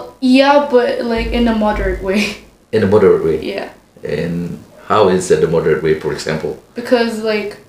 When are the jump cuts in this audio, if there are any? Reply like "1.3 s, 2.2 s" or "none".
none